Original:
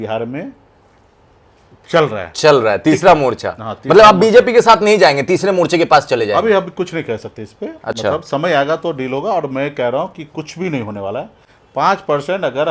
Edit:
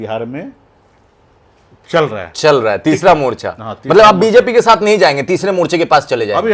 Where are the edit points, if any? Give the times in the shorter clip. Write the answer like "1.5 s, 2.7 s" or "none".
none